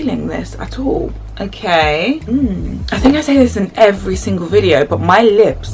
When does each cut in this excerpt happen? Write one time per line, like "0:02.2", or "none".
0:01.2
0:02.8